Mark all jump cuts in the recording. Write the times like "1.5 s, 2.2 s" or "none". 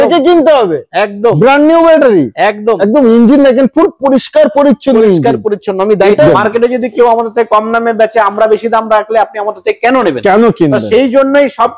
6.3 s